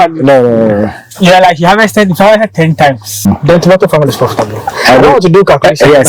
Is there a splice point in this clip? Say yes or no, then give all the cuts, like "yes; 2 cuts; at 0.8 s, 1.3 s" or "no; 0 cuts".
yes; 1 cut; at 3.3 s